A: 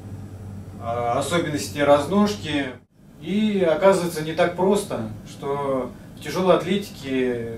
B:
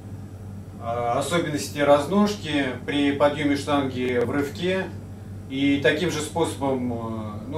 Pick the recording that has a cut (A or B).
A